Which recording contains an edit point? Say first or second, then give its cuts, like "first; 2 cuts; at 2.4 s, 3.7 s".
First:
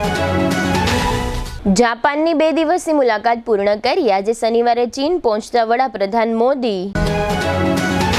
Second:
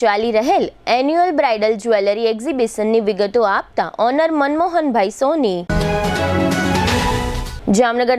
first; 1 cut; at 1.0 s